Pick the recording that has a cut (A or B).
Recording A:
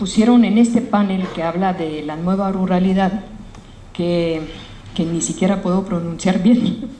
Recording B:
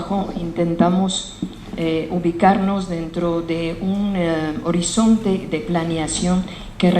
B